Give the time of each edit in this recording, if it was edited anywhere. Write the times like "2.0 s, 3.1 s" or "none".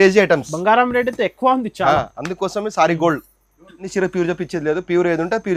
3.9 s